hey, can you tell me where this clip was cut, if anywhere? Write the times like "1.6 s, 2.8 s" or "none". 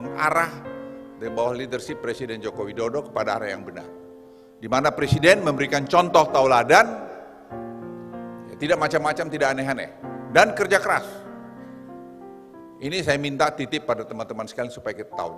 11.2 s, 12.7 s